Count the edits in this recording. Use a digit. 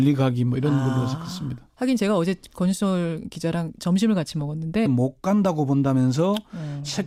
0